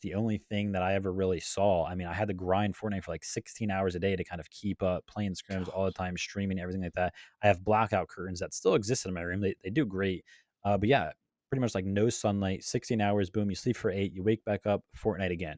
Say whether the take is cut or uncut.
uncut